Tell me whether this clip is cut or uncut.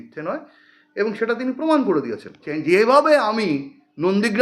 cut